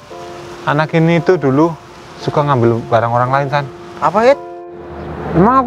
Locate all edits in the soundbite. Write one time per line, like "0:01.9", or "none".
0:04.6